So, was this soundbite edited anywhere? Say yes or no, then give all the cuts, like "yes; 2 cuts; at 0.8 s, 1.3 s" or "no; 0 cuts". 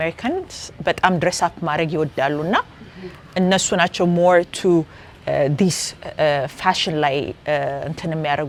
no; 0 cuts